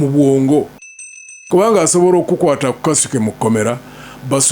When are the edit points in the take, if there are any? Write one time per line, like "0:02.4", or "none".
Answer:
0:01.0